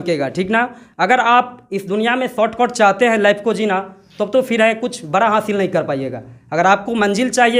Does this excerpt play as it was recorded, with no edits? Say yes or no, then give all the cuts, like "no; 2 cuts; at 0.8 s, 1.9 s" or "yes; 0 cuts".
yes; 0 cuts